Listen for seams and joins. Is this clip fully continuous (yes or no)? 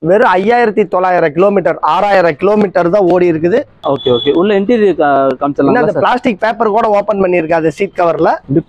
no